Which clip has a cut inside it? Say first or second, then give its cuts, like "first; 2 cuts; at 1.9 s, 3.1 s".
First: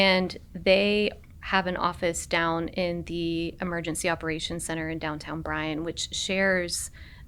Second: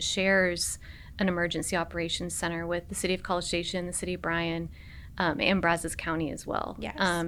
first; 1 cut; at 1.3 s